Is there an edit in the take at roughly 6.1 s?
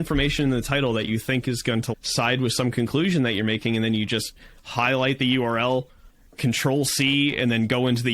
no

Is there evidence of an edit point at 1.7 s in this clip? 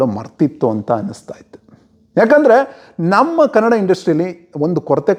no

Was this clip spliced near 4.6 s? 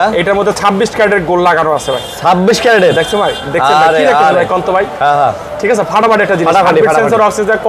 no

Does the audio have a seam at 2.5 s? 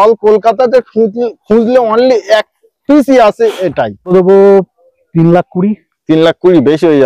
no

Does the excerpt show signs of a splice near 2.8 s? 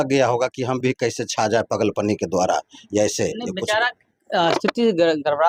no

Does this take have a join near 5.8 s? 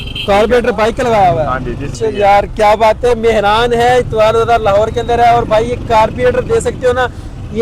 no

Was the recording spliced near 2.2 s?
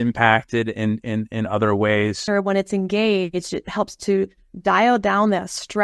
yes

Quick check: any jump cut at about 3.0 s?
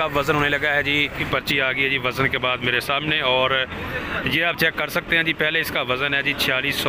no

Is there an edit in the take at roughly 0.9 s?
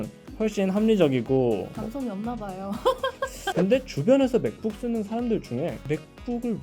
no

